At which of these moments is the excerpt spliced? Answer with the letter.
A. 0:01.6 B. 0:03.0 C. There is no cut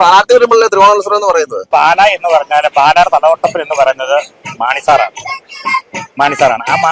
A